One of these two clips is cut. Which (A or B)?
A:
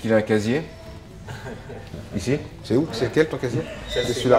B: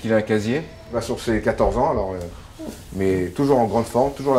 B